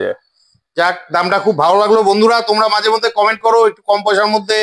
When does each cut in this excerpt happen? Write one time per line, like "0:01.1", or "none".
none